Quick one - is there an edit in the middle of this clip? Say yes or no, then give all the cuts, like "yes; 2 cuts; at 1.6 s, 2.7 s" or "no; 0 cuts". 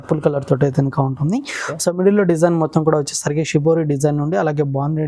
no; 0 cuts